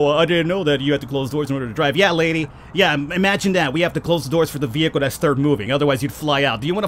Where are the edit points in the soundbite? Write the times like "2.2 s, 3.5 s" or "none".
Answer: none